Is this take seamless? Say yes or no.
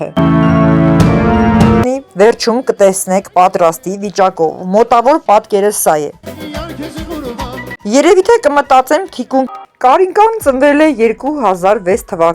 no